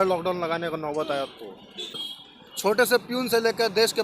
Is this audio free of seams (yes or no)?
no